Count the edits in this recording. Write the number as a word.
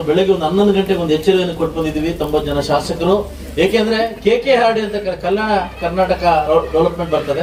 zero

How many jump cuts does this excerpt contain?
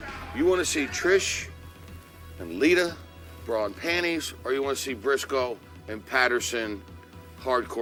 zero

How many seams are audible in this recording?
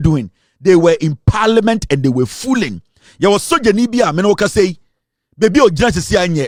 zero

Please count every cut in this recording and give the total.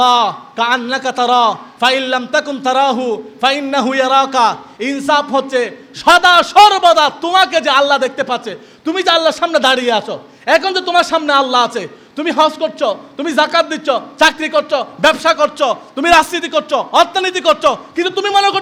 zero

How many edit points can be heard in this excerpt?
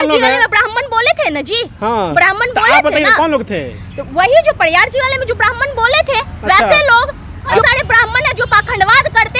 one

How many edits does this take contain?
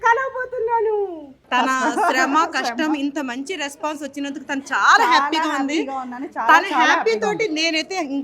one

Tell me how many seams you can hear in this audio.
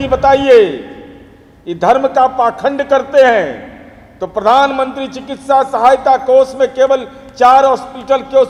zero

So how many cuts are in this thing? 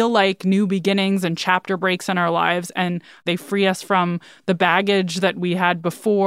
one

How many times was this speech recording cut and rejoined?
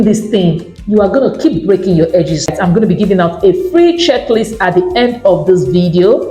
one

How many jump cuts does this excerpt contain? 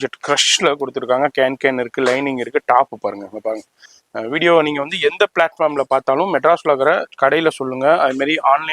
one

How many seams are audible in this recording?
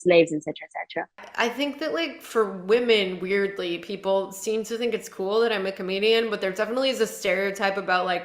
one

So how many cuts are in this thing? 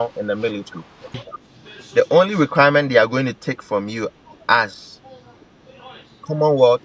one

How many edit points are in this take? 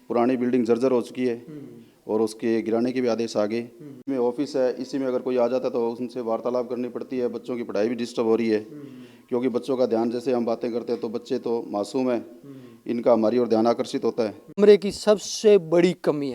two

